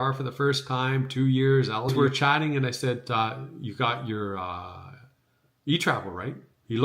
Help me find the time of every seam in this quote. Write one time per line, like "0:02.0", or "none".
0:01.9